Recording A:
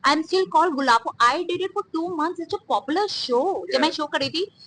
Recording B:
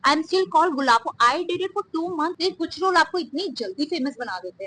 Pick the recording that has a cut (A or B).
B